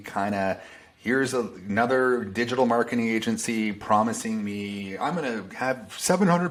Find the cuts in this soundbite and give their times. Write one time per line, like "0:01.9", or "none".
none